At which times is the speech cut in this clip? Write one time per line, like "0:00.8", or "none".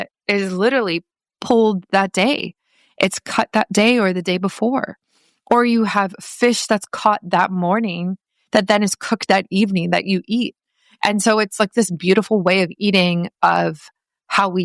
0:01.3